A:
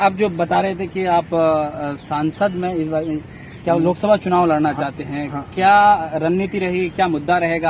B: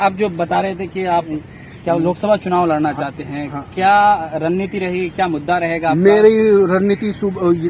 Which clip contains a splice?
B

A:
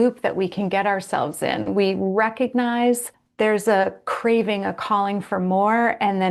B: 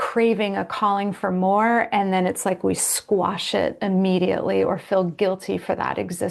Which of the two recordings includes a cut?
A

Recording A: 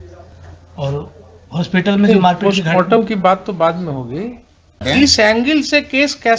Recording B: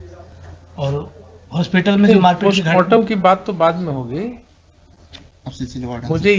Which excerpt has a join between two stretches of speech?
A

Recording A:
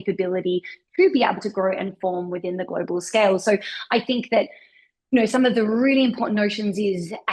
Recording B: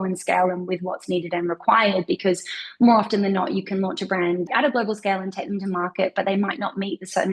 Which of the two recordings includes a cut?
B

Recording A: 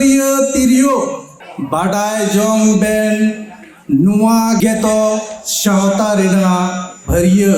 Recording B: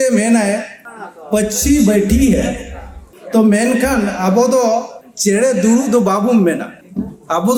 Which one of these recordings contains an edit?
A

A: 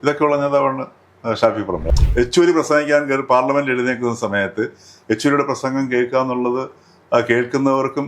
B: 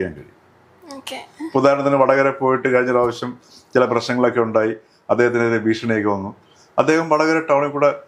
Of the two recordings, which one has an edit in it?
A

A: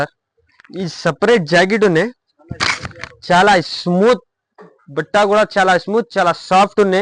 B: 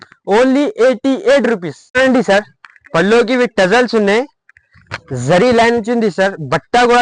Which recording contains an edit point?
B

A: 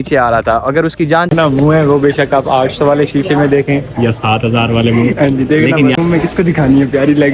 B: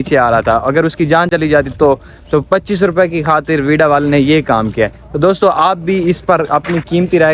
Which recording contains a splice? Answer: A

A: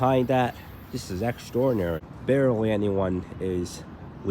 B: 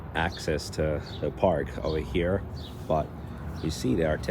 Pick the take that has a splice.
A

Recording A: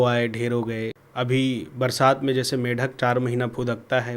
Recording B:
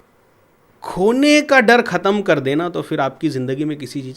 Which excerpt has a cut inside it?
A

